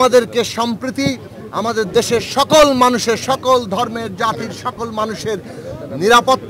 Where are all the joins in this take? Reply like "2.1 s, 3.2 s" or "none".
none